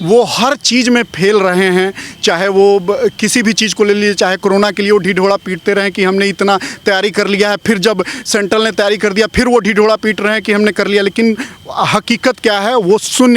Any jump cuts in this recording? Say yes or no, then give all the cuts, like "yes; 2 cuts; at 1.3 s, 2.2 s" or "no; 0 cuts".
no; 0 cuts